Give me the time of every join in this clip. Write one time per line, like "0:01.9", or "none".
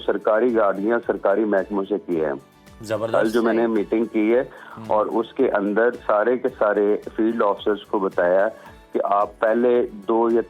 none